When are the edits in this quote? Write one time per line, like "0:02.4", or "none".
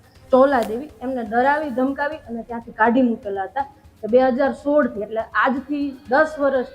none